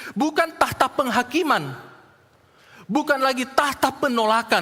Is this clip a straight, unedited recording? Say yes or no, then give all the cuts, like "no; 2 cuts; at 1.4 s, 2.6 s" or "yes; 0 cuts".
yes; 0 cuts